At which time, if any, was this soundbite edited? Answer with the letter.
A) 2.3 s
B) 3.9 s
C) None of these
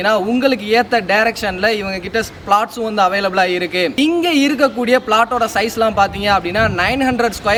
C